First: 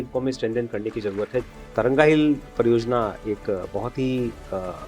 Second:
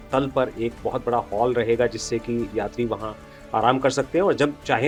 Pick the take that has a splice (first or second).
first